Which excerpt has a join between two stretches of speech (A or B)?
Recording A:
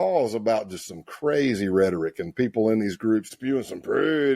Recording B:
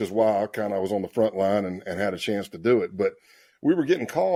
A